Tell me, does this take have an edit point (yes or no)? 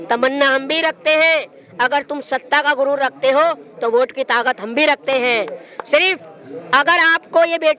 no